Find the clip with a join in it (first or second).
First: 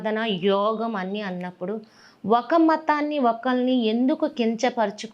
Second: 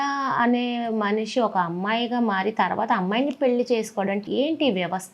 second